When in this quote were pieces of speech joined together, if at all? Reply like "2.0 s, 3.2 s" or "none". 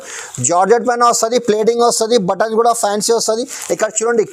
none